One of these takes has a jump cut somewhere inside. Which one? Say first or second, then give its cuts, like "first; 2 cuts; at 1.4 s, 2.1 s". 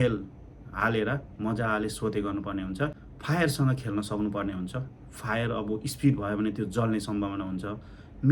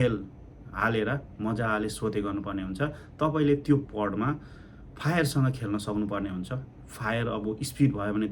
first; 1 cut; at 3.0 s